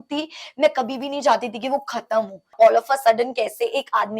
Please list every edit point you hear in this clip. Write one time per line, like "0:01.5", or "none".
0:02.5